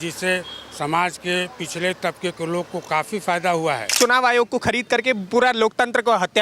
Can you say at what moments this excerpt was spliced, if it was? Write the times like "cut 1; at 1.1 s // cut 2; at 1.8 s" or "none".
cut 1; at 3.9 s